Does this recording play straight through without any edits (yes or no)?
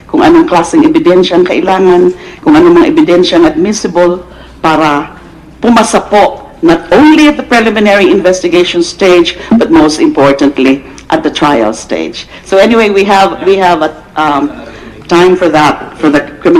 no